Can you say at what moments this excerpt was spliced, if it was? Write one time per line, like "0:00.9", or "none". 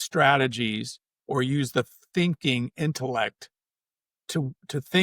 none